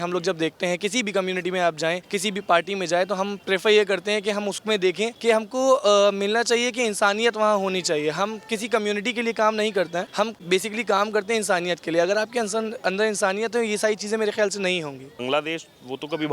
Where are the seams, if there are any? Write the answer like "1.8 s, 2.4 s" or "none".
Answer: 2.1 s, 3.4 s, 5.2 s, 10.3 s, 15.1 s